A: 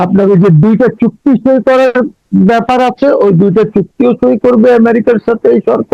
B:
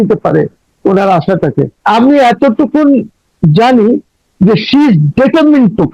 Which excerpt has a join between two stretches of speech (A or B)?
B